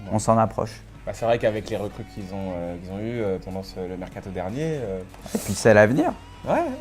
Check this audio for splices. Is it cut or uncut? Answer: cut